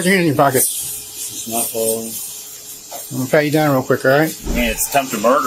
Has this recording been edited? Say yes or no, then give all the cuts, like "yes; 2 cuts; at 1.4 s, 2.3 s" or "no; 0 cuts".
yes; 1 cut; at 4.4 s